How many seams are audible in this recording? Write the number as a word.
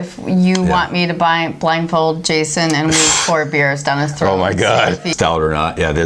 one